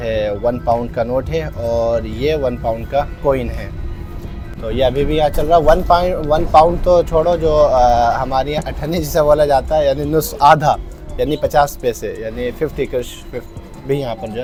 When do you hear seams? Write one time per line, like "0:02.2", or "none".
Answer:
none